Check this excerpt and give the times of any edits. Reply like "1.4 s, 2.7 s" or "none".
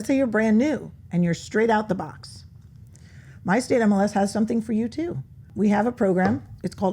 5.5 s